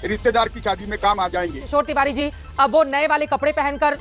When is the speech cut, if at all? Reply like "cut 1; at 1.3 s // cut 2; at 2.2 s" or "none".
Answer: cut 1; at 1.6 s